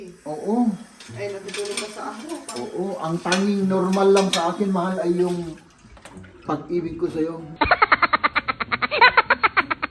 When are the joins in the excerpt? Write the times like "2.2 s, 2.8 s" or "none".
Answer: 7.4 s